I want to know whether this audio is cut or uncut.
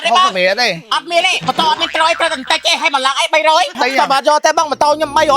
cut